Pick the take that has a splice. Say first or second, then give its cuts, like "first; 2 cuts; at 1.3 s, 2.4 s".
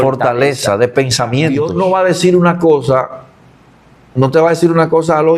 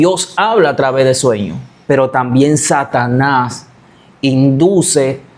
first; 1 cut; at 1.6 s